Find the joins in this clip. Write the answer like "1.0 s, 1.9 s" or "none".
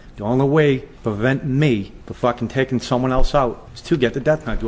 0.9 s, 2.0 s, 3.7 s